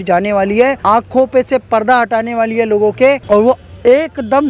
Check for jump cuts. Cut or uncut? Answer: cut